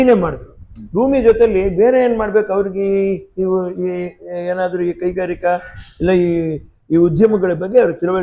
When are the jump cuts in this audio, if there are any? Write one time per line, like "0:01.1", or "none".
none